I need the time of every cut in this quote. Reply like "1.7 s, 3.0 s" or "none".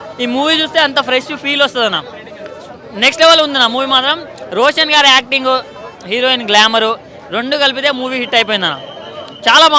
none